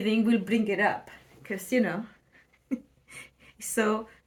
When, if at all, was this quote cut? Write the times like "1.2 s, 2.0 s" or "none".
none